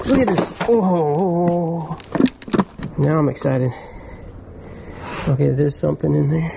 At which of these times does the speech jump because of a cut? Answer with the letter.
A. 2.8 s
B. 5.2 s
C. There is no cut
A